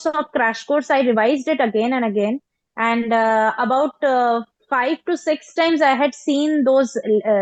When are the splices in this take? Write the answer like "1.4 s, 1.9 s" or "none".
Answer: none